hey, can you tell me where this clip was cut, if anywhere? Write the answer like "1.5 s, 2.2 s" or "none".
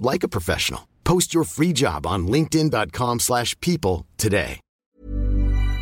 4.6 s